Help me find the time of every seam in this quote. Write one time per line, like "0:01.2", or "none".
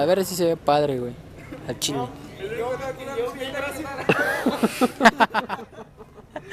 none